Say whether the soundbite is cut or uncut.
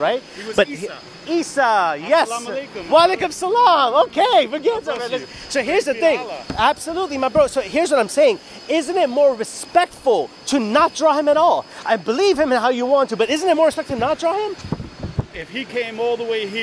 uncut